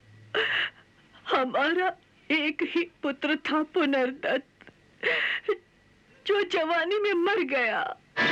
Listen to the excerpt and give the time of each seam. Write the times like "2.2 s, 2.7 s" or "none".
none